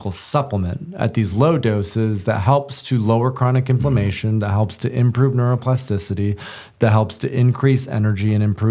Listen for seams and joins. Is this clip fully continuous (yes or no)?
yes